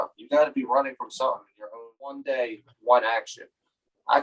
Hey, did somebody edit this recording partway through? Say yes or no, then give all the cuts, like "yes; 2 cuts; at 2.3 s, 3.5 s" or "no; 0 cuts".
yes; 1 cut; at 2.2 s